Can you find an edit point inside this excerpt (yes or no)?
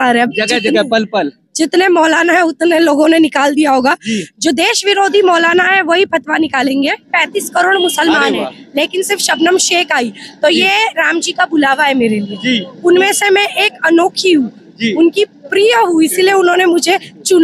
yes